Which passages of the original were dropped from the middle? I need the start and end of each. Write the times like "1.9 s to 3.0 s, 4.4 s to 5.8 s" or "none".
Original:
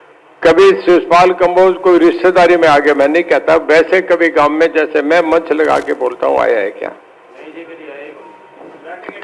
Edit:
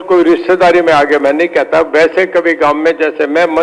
none